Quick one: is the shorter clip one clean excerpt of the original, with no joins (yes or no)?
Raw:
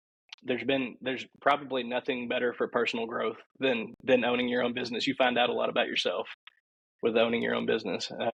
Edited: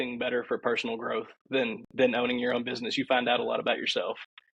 yes